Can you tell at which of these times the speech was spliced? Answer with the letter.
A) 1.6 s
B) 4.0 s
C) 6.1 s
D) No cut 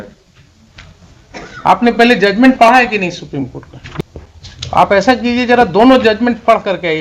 B